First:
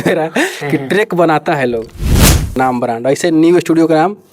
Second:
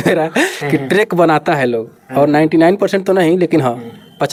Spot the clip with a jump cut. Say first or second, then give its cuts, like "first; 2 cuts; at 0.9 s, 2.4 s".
first; 1 cut; at 2.2 s